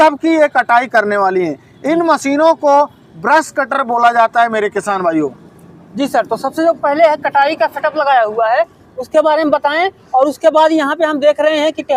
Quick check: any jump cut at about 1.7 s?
no; 0 cuts

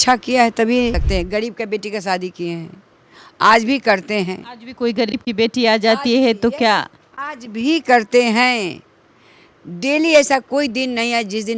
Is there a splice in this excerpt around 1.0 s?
yes; 1 cut; at 1.0 s

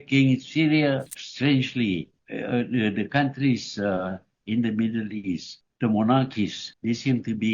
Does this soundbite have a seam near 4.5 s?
no; 1 cut; at 1.1 s

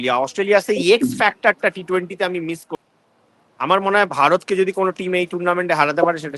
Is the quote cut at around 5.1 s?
no; 1 cut; at 2.6 s

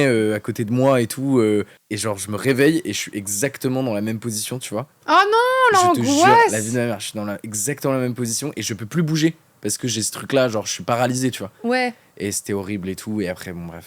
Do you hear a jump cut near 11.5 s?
no; 1 cut; at 1.8 s

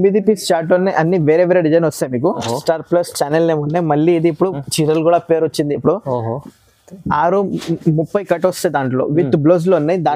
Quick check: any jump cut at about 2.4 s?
yes; 1 cut; at 2.4 s

